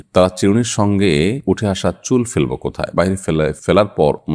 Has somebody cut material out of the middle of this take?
no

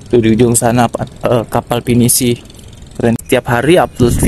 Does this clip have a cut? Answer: yes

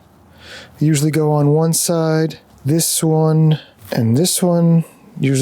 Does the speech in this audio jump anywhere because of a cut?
yes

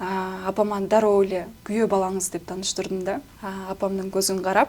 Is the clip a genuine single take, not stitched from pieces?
no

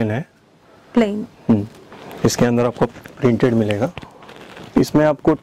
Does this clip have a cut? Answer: yes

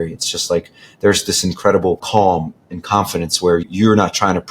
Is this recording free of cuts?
no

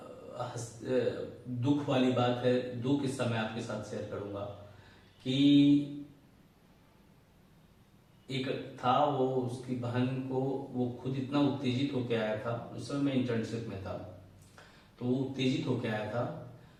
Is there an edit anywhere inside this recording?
no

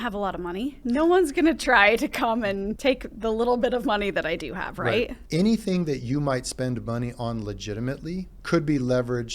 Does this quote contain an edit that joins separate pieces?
yes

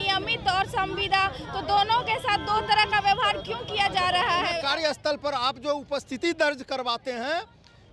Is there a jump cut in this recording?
yes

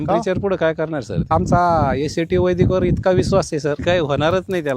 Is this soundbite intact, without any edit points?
no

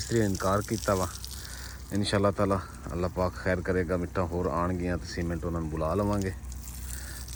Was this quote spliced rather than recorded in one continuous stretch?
no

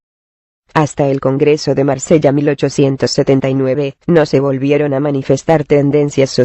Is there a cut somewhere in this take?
no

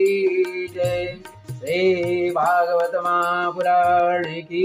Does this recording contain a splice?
no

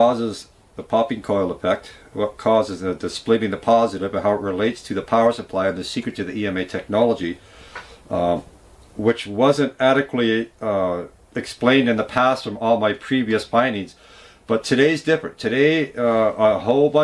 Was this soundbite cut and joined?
yes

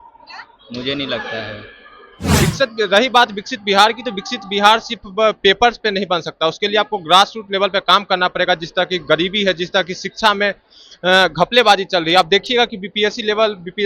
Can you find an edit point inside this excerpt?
yes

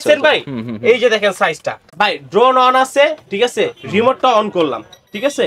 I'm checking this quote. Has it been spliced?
yes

